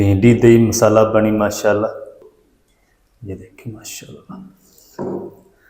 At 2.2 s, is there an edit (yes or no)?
yes